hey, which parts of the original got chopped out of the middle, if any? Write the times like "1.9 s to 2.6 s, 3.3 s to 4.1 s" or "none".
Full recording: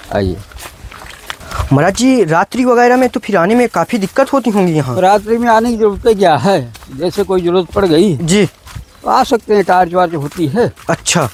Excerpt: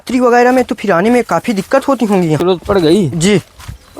4.9 s to 7.5 s